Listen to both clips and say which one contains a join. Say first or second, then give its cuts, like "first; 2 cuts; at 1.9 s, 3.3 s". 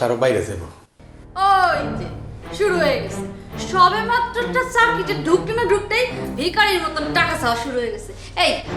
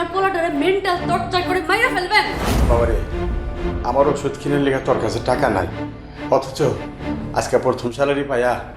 second; 1 cut; at 2.5 s